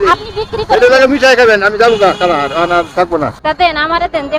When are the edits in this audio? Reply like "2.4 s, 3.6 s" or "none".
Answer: 3.4 s